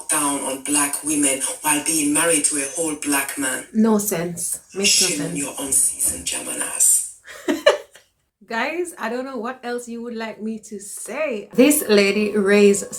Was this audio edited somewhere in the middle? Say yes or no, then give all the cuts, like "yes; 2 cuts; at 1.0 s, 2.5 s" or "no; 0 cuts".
no; 0 cuts